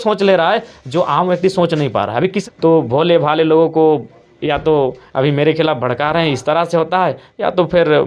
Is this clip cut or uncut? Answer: cut